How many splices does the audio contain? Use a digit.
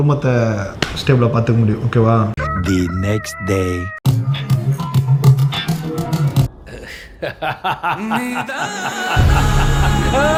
0